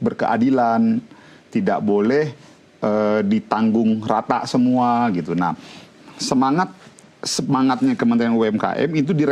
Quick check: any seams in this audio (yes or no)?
no